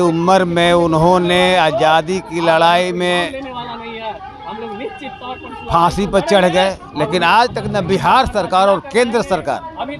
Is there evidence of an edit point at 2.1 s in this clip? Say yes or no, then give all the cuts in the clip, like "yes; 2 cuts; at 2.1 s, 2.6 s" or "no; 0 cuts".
no; 0 cuts